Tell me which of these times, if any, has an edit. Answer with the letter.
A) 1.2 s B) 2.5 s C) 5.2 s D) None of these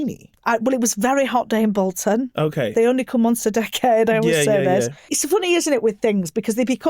C